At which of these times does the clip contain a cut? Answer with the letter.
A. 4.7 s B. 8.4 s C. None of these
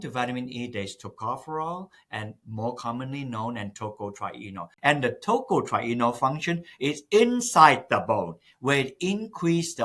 A